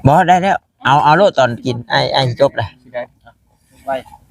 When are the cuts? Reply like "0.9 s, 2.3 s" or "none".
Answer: none

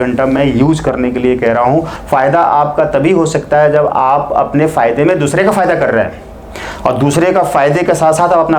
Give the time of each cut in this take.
1.9 s

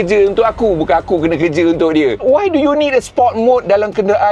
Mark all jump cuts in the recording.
2.2 s

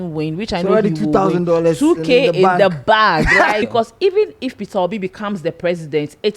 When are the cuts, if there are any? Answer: 3.6 s

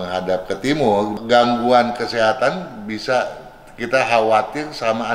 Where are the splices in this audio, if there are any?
1.1 s

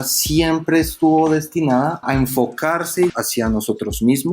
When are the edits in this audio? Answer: 2.0 s, 3.1 s

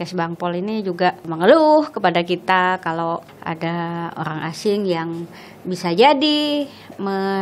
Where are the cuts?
1.2 s, 3.3 s

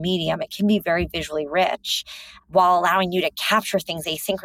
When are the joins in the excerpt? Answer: none

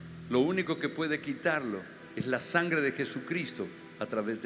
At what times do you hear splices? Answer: none

